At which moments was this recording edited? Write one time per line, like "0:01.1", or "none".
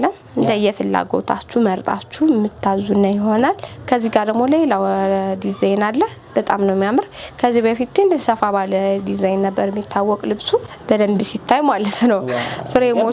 0:03.6
0:10.7